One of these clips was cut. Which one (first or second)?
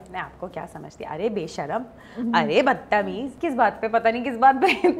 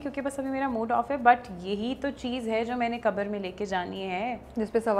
first